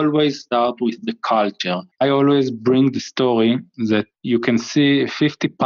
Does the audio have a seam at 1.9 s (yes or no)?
yes